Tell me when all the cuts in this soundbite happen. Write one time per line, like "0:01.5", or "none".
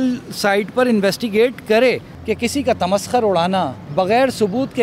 0:02.1
0:03.8

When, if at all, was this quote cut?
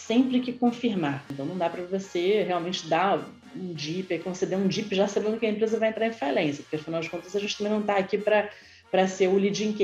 0:01.3

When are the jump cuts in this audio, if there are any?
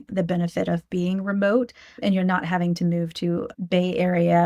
0:01.9
0:03.5

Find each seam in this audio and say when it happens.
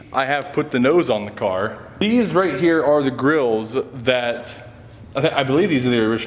0:02.0

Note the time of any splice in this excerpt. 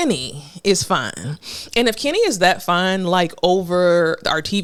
none

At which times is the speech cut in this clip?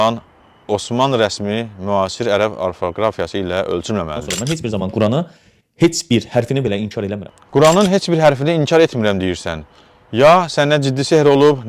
0:04.2
0:07.3

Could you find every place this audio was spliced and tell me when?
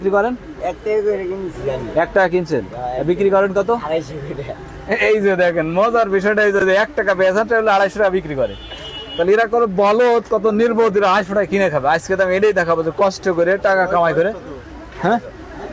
none

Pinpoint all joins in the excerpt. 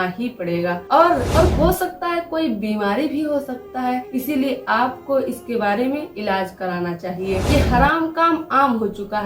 0:01.3
0:07.4

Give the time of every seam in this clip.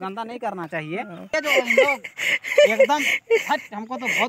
0:01.3

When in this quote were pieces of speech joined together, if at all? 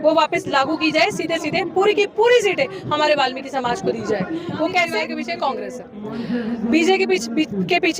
0:05.0

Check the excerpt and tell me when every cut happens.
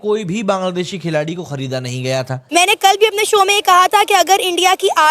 0:02.4

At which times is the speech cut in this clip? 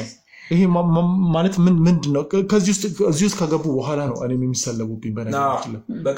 none

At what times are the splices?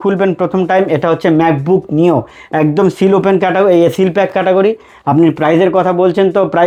none

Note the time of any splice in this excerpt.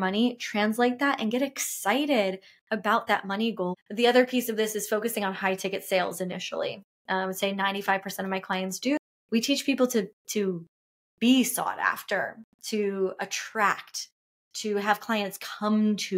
0:03.8
0:09.0

